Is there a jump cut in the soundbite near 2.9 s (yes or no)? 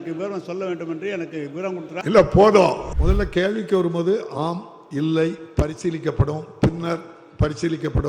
yes